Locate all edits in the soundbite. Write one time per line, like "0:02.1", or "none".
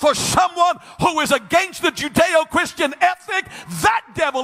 none